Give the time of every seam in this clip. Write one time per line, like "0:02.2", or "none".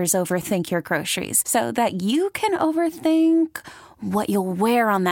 none